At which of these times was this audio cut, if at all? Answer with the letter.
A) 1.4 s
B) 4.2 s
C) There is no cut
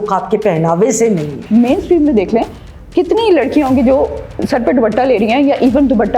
A